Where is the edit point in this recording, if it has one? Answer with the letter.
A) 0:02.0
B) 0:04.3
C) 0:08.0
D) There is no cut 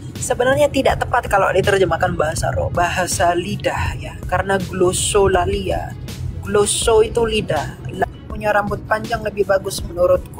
C